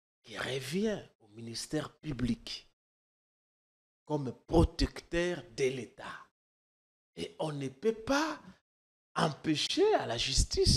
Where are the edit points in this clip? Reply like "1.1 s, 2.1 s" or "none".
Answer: none